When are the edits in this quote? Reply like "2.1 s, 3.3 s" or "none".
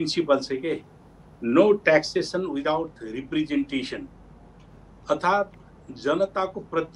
none